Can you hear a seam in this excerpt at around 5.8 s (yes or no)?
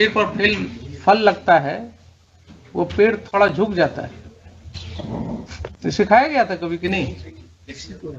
yes